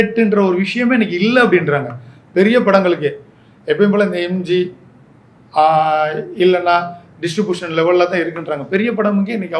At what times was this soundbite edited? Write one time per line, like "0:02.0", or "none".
none